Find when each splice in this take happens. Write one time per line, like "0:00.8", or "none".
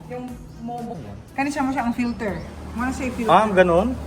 0:00.9